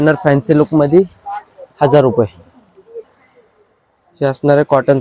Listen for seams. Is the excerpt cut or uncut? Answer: cut